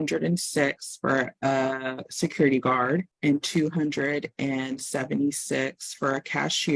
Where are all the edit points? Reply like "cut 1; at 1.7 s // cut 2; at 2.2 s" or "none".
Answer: cut 1; at 3.1 s